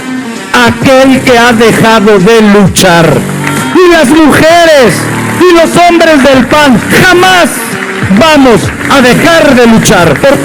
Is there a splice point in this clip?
no; 0 cuts

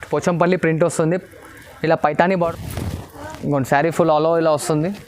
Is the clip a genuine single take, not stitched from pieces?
no; 1 cut; at 2.4 s

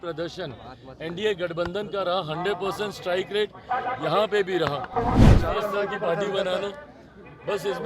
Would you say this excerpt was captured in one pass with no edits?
no; 1 cut; at 5.4 s

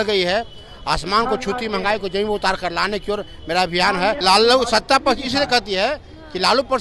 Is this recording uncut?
no; 1 cut; at 4.2 s

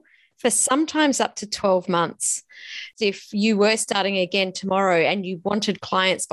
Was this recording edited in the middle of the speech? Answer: yes; 1 cut; at 2.9 s

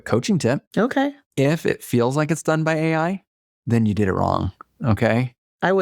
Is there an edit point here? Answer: yes; 1 cut; at 0.9 s

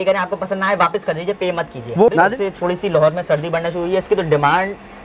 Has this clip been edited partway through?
yes; 1 cut; at 2.1 s

